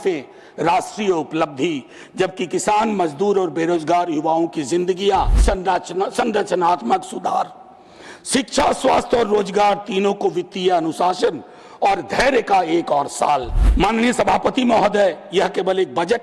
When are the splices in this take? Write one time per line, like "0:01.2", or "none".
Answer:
0:05.4
0:13.6